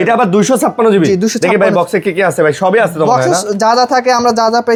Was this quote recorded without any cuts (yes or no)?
yes